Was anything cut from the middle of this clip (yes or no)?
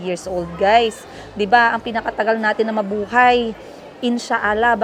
no